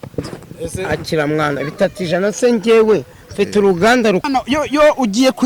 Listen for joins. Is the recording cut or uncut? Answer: cut